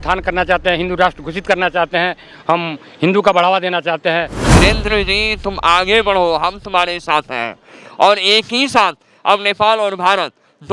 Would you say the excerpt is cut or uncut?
cut